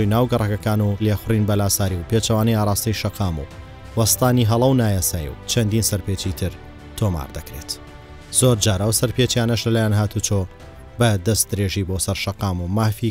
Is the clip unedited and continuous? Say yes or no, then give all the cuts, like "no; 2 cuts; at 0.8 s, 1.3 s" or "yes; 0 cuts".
no; 1 cut; at 1.0 s